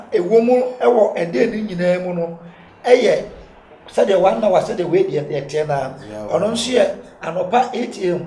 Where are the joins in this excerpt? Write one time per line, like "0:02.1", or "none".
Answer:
none

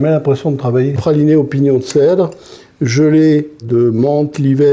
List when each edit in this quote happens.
0:01.0

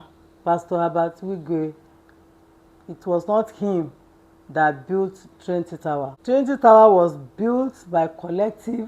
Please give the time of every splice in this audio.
0:06.2

